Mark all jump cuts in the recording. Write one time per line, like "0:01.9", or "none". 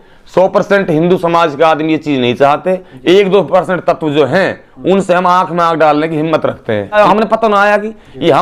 0:07.0